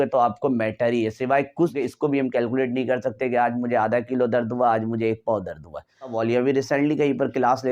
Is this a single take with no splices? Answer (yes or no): no